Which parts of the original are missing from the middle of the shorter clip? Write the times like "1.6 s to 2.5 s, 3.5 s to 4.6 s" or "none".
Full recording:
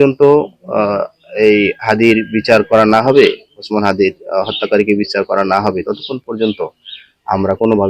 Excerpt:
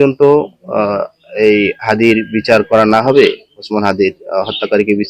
none